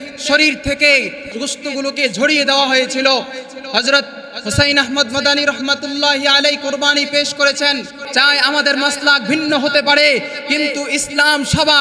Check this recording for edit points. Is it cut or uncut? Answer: cut